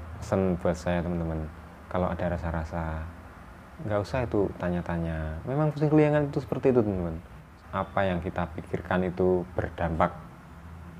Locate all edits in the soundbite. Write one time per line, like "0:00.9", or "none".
0:07.4